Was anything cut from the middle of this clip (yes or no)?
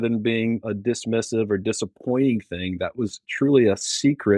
no